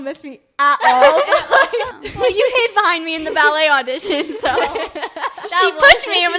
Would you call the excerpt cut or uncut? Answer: cut